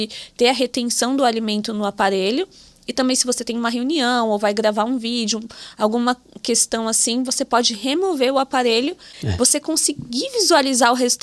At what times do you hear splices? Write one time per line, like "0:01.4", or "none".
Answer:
0:09.1